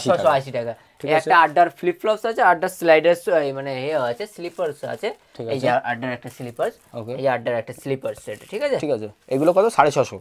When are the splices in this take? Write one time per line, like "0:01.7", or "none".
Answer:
none